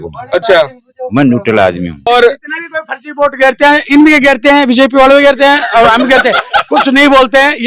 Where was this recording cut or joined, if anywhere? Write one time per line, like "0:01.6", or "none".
0:02.1